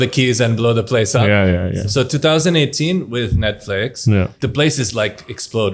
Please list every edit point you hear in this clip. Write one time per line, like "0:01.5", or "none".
0:01.8
0:04.3